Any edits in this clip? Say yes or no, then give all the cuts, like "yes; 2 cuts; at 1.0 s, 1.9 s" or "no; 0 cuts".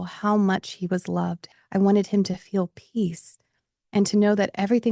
yes; 1 cut; at 1.4 s